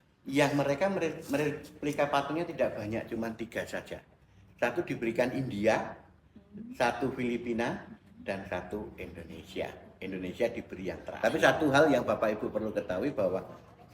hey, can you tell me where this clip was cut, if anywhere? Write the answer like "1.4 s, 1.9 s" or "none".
11.1 s